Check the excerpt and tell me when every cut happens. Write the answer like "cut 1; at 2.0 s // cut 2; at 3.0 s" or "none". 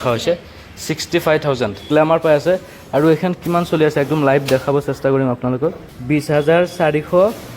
cut 1; at 1.8 s // cut 2; at 5.9 s